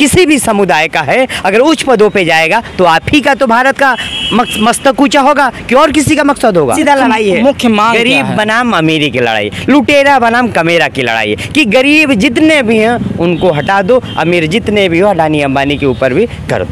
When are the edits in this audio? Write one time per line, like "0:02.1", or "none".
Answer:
0:06.8